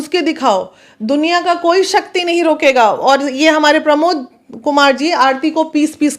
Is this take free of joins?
yes; 0 cuts

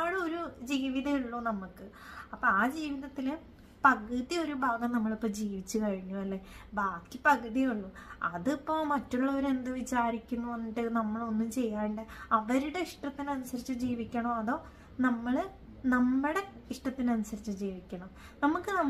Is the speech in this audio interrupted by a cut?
no; 0 cuts

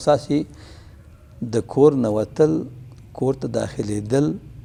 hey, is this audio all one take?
yes; 0 cuts

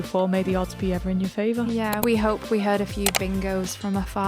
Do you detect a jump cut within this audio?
yes; 1 cut; at 2.0 s

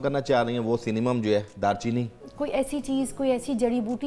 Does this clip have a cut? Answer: yes; 1 cut; at 2.2 s

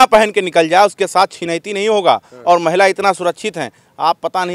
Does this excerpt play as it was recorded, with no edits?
yes; 0 cuts

